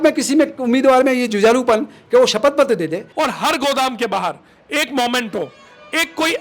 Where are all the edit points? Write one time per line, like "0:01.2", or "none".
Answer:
0:03.0